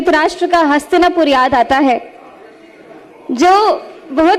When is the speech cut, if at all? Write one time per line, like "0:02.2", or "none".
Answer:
none